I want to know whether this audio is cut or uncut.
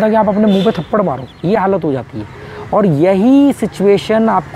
uncut